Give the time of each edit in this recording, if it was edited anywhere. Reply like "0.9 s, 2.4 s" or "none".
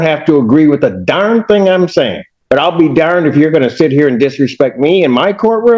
2.3 s

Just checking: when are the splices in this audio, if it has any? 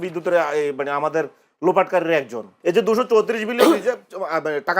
2.4 s

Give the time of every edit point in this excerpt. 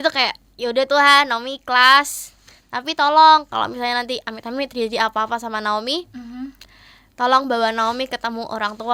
none

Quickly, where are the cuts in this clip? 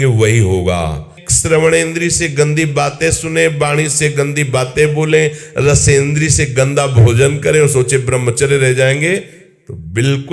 1.2 s

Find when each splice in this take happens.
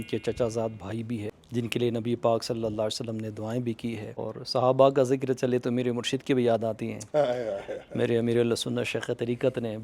1.4 s, 4.2 s

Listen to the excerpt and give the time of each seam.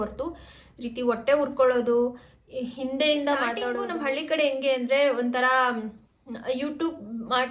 3.8 s

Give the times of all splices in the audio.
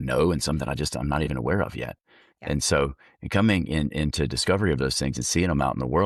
none

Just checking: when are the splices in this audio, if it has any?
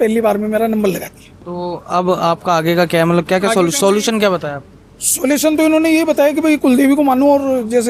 none

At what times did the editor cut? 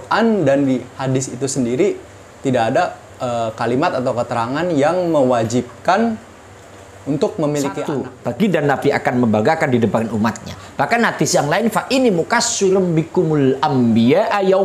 8.0 s

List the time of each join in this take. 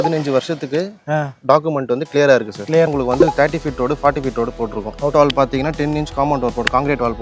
2.9 s, 5.1 s

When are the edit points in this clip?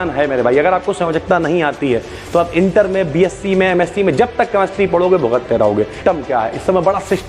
6.0 s

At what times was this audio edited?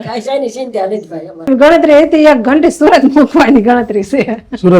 1.5 s

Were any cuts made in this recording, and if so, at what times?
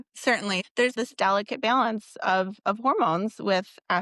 0.9 s

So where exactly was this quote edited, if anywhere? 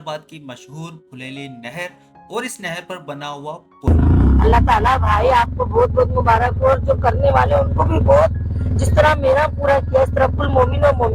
3.9 s

